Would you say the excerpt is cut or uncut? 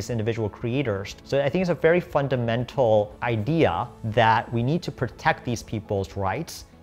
cut